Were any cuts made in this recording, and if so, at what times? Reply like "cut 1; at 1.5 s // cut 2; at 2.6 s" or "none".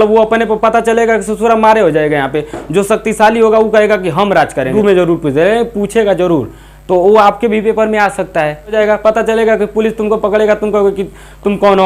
cut 1; at 4.7 s // cut 2; at 8.7 s